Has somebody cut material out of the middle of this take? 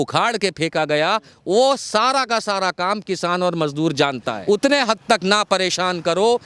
yes; 1 cut; at 4.3 s

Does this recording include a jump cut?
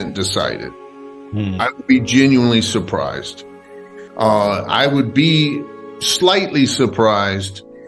no; 0 cuts

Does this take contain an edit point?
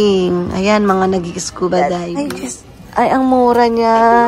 yes; 1 cut; at 2.1 s

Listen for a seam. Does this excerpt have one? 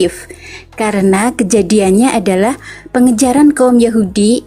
no; 0 cuts

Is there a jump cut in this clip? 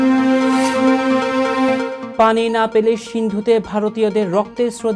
yes; 1 cut; at 2.0 s

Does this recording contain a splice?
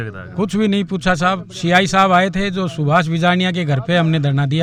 no; 0 cuts

